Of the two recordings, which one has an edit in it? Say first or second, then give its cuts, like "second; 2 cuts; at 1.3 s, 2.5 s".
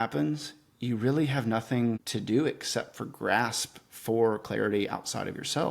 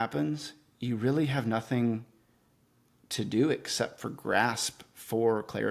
first; 1 cut; at 2.1 s